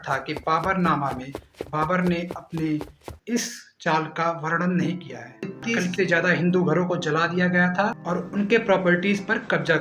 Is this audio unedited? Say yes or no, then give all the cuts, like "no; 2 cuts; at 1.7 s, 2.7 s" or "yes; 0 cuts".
no; 1 cut; at 5.5 s